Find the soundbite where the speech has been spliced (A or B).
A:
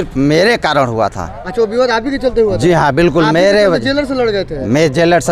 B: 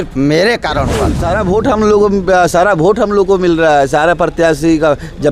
B